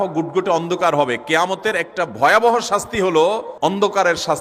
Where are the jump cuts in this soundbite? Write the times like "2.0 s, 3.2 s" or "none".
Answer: 3.5 s

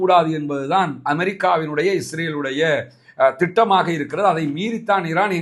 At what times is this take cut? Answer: none

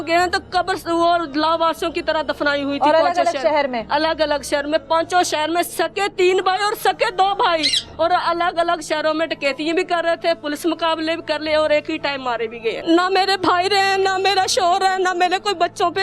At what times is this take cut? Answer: 12.8 s

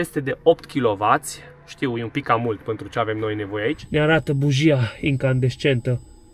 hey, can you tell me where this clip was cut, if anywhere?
3.8 s

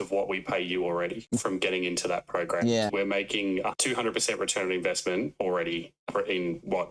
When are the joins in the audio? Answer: 3.8 s, 6.1 s

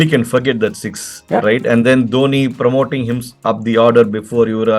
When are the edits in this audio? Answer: none

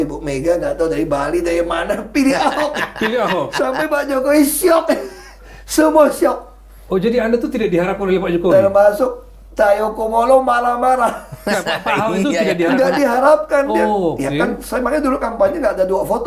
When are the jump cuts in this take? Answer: none

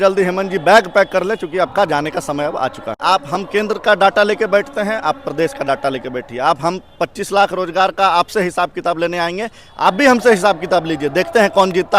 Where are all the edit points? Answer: 3.0 s

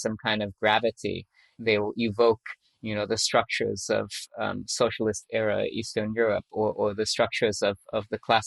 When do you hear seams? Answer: 1.4 s

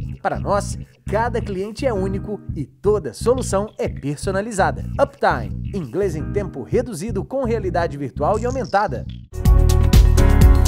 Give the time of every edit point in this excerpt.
9.6 s

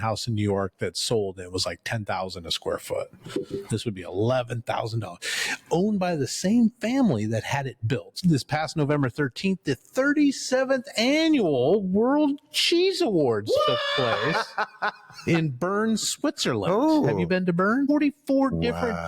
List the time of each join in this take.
8.1 s, 17.9 s

